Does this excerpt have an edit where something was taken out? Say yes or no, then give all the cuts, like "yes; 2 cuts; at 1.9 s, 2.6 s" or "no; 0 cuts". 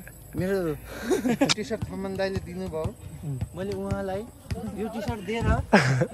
yes; 1 cut; at 1.5 s